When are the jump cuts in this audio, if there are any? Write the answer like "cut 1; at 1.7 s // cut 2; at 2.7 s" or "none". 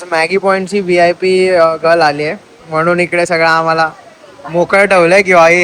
none